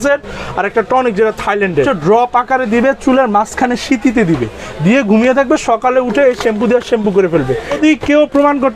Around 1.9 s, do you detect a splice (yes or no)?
yes